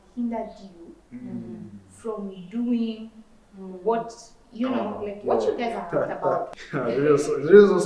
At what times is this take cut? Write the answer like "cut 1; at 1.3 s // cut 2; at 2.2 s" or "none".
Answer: cut 1; at 6.5 s